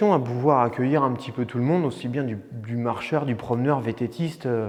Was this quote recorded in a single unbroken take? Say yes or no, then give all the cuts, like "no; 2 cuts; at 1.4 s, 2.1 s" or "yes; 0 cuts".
yes; 0 cuts